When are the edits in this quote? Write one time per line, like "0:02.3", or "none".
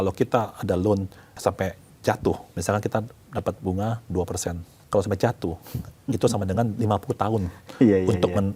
0:01.2
0:02.5
0:04.7